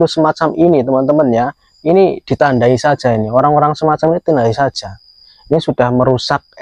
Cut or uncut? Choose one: uncut